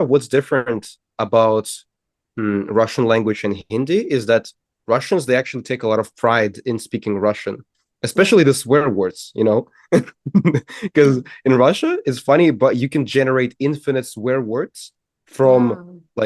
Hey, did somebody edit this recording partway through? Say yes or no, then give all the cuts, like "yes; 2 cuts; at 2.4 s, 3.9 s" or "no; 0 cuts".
no; 0 cuts